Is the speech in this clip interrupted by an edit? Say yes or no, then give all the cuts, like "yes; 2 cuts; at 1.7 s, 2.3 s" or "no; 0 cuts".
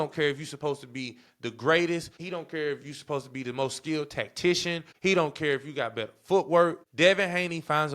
yes; 3 cuts; at 2.2 s, 4.9 s, 6.8 s